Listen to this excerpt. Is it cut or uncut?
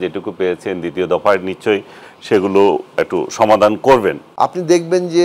cut